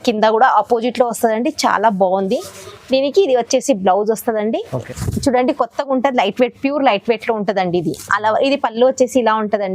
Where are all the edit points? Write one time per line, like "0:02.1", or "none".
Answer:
0:04.9